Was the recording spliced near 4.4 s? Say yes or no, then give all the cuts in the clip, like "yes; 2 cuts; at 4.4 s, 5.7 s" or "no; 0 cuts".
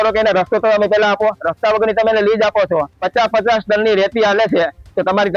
no; 1 cut; at 3.0 s